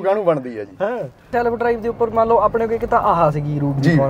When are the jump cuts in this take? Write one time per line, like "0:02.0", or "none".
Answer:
0:01.3